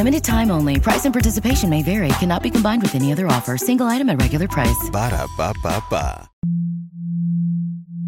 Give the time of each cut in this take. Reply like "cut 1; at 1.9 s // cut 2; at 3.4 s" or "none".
cut 1; at 6.4 s